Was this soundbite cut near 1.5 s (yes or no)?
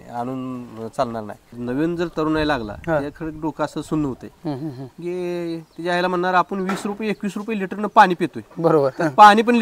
yes